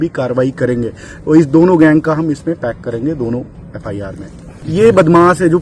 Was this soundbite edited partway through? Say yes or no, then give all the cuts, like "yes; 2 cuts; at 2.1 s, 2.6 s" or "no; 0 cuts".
no; 0 cuts